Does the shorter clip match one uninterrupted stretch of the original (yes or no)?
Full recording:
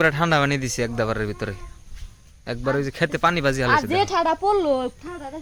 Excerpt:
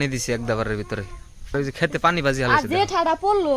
no